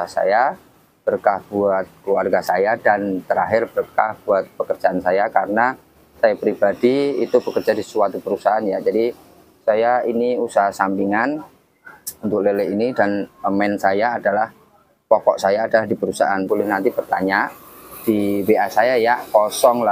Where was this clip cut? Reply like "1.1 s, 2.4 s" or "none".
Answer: 16.5 s